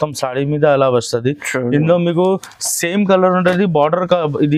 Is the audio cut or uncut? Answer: uncut